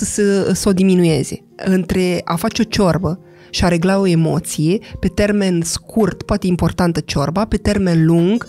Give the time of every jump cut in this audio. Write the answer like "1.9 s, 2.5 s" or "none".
1.4 s